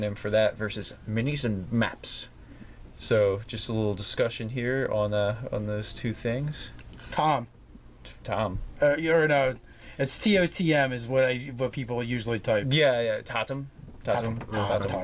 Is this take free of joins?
yes; 0 cuts

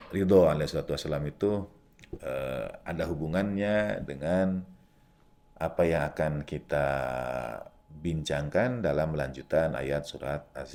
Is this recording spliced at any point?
no; 0 cuts

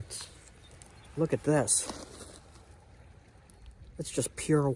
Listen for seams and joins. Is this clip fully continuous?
yes; 0 cuts

